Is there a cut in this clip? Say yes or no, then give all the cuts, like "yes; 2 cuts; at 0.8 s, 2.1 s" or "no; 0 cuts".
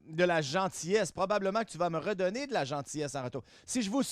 no; 0 cuts